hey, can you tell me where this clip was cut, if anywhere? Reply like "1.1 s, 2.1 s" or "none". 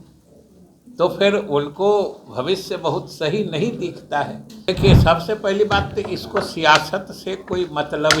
4.7 s